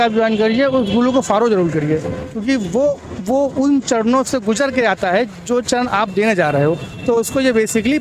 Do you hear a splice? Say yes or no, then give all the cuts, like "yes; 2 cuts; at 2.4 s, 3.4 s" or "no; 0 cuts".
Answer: no; 0 cuts